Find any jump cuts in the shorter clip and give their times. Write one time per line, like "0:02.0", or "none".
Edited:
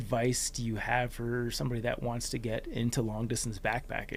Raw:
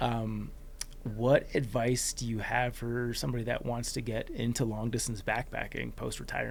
none